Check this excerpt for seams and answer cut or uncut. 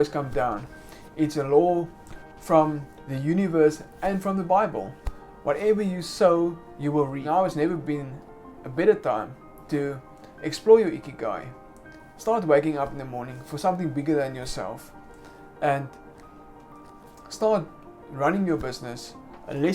cut